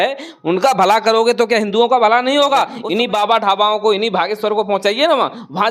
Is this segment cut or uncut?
cut